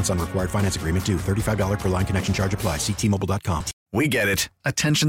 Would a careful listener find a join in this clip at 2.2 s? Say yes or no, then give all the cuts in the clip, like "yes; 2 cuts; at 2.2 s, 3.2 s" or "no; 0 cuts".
no; 1 cut; at 3.8 s